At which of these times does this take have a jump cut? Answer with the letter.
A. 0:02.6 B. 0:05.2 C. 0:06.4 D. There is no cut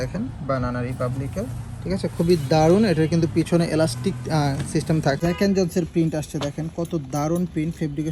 B